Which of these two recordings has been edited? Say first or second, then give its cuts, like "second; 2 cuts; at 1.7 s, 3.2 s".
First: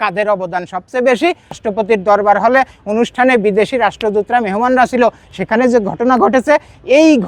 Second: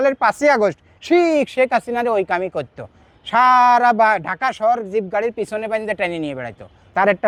first; 1 cut; at 1.6 s